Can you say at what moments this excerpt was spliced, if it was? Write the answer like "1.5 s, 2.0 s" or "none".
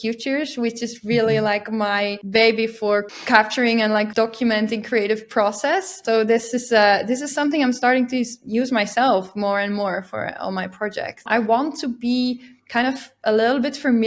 2.2 s, 3.2 s, 4.1 s, 6.0 s, 11.3 s